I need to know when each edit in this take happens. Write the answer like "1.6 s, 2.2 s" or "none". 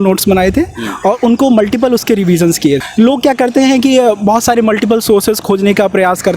2.8 s